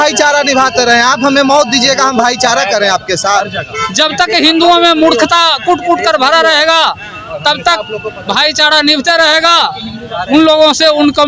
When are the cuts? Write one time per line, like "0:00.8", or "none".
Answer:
none